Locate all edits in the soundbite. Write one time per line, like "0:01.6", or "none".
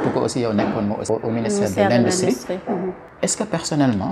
0:01.0
0:03.0